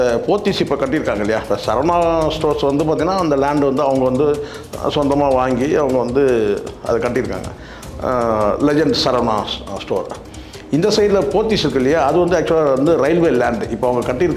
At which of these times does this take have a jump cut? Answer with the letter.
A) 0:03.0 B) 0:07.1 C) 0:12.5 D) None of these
D